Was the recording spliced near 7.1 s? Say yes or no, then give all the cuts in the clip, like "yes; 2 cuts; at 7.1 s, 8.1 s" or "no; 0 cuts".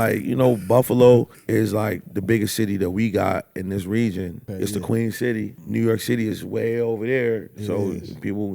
no; 3 cuts; at 1.4 s, 4.4 s, 5.6 s